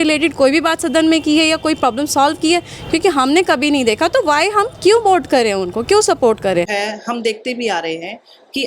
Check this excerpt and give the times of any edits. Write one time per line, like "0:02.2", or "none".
0:06.7